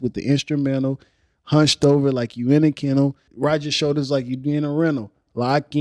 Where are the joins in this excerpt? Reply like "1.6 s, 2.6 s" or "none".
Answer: 3.3 s

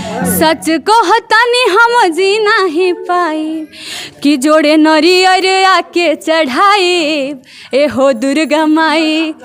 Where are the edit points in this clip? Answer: none

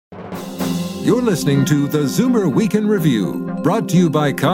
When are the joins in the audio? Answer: 1.0 s

